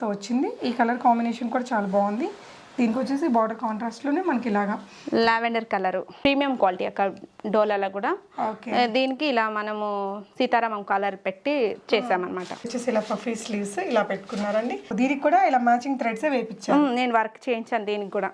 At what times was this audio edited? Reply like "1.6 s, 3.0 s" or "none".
6.1 s, 12.7 s, 14.9 s